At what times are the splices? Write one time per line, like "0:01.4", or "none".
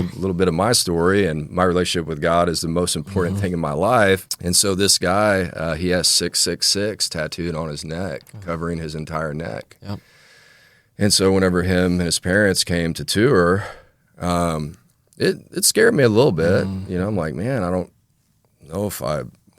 0:04.3